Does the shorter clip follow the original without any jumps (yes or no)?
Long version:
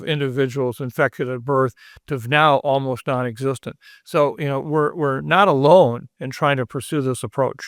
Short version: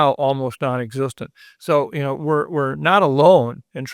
yes